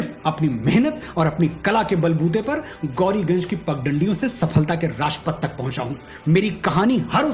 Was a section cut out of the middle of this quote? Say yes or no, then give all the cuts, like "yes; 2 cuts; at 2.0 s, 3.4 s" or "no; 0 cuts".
no; 0 cuts